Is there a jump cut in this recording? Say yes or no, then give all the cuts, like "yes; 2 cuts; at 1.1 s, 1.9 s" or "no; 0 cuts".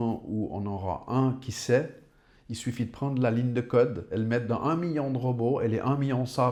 no; 0 cuts